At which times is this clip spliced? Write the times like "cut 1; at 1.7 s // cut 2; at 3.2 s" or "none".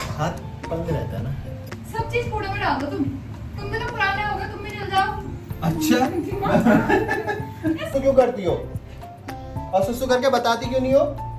cut 1; at 1.5 s // cut 2; at 7.8 s